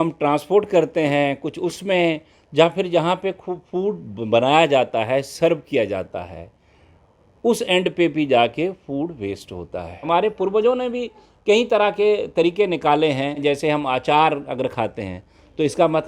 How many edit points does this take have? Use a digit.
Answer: 2